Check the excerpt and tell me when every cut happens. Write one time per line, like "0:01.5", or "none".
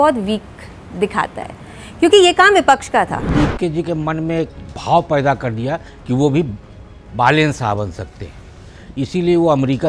0:03.3